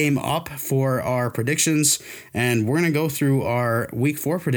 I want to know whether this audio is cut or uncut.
uncut